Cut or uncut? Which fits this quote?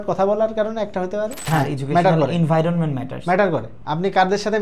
cut